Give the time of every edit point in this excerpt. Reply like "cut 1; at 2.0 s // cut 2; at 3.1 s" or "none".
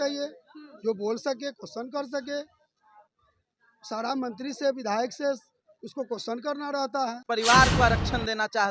cut 1; at 7.2 s